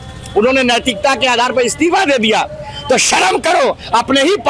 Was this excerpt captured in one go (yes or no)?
yes